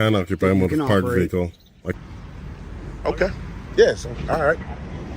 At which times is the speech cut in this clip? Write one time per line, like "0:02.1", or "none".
0:02.0

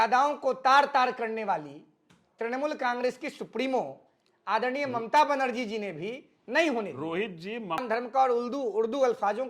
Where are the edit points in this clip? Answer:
0:07.8

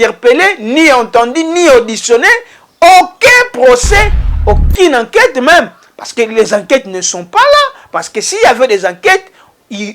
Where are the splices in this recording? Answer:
0:04.2

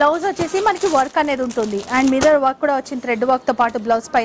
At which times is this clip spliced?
none

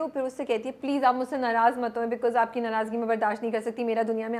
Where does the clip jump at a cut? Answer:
none

